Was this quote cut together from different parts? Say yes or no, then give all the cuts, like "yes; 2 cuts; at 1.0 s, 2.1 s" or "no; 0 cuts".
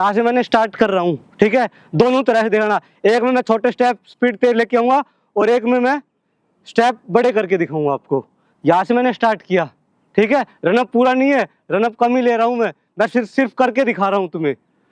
no; 0 cuts